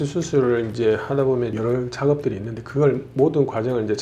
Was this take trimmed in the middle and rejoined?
yes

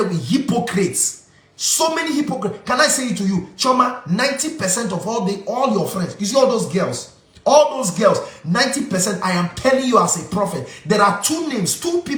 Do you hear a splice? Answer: no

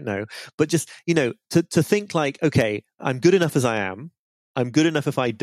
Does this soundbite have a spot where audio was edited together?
yes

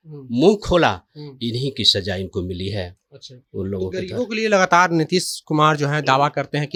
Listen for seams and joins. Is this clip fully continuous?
yes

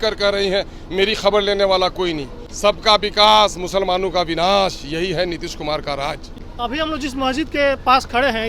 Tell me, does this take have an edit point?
yes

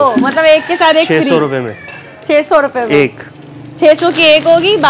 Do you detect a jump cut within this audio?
no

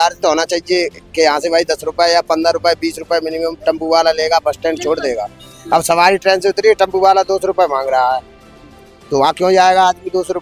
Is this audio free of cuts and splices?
yes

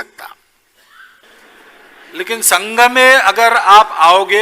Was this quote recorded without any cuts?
no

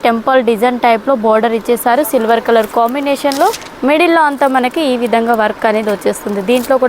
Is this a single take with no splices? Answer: no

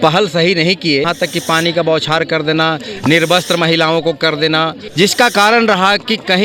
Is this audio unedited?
no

